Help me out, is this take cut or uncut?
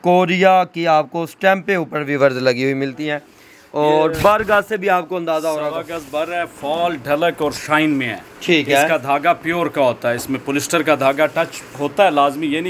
uncut